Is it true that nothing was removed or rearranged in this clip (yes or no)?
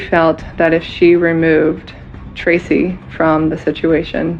yes